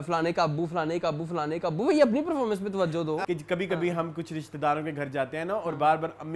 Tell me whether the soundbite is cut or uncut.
cut